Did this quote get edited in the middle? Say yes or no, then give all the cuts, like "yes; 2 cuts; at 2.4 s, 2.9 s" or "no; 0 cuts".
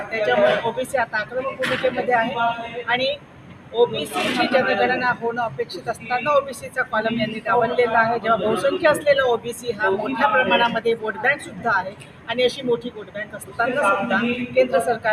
no; 0 cuts